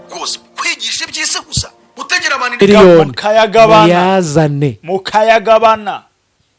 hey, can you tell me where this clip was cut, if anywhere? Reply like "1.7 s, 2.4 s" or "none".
2.6 s